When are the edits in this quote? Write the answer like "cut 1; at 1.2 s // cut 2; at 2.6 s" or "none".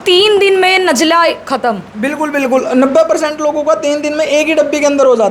none